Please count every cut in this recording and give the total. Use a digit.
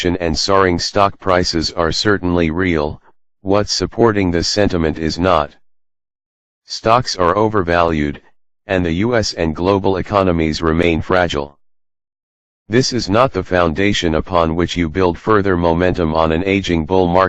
1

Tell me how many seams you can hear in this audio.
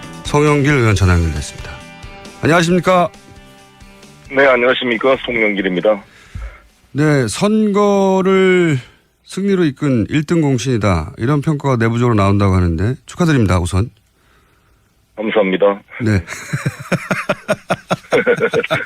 1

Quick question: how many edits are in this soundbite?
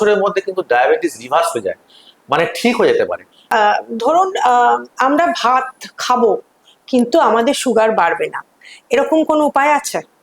1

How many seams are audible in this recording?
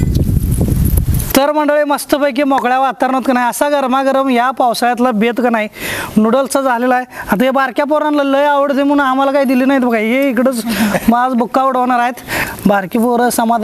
2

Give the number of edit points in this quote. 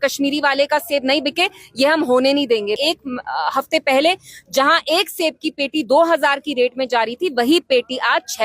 1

